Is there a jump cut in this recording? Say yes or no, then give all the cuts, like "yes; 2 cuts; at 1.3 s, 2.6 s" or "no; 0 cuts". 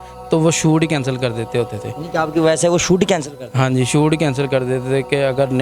no; 0 cuts